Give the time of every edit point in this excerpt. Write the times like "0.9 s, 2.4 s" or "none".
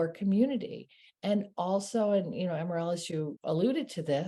3.3 s